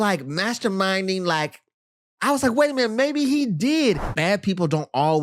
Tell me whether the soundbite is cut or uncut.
cut